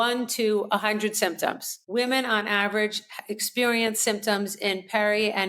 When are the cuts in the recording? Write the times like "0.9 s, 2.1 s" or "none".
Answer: 1.7 s